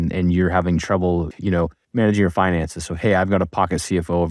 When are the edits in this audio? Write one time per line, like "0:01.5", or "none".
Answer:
0:01.3